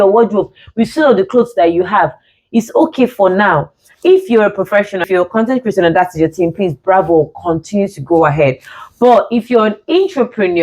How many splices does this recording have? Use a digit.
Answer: 1